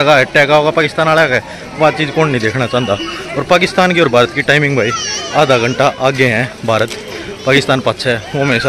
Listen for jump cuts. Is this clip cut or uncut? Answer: uncut